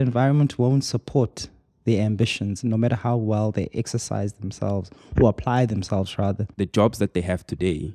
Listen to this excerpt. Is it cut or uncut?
cut